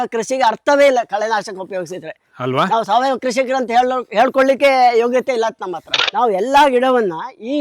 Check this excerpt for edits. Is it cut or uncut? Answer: cut